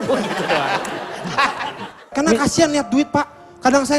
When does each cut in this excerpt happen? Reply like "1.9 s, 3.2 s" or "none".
2.1 s